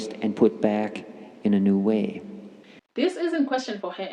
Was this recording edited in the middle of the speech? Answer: yes; 1 cut; at 3.0 s

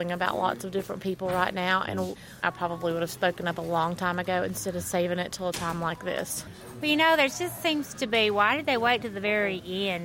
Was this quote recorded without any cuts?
no; 1 cut; at 2.3 s

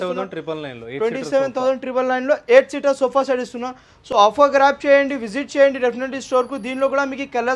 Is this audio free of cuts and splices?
yes; 0 cuts

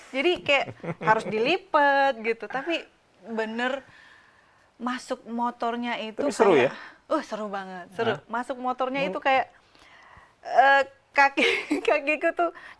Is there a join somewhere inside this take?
no; 0 cuts

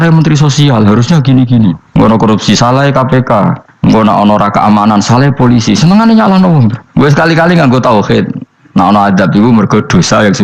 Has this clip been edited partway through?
yes; 2 cuts; at 1.8 s, 3.7 s

